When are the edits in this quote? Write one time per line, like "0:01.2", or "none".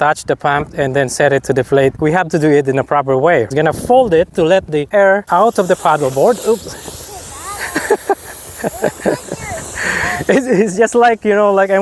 0:02.0
0:03.5
0:04.9
0:06.4